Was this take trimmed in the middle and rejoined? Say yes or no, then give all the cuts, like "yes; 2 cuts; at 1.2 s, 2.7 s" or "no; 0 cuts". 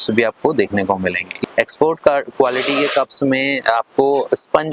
yes; 1 cut; at 1.3 s